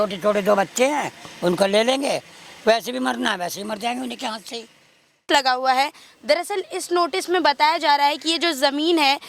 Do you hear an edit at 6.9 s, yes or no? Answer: no